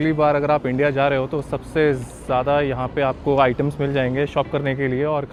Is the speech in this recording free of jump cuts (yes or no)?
yes